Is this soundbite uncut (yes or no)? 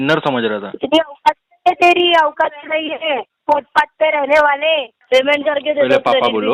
no